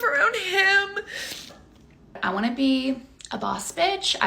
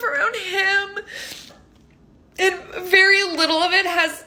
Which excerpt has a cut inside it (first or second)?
first